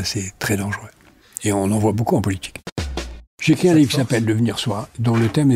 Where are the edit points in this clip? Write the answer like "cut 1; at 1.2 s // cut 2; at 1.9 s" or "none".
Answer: cut 1; at 3.1 s